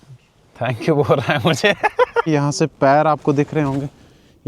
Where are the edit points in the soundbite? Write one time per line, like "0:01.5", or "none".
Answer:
0:02.3